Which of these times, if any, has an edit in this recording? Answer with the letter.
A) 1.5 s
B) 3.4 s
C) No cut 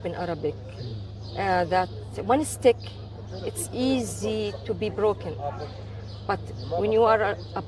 C